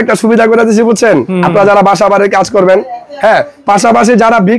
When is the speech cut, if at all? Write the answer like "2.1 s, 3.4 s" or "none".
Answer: none